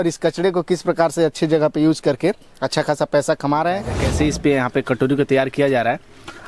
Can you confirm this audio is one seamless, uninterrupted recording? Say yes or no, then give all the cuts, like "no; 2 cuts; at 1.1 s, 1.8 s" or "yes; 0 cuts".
no; 1 cut; at 4.0 s